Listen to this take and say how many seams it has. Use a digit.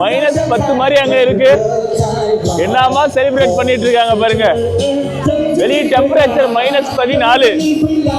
0